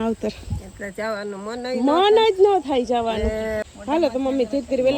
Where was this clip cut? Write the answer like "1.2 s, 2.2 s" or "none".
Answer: 3.7 s